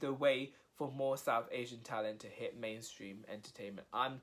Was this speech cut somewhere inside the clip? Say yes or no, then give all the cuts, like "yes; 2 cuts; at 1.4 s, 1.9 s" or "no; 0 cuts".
no; 0 cuts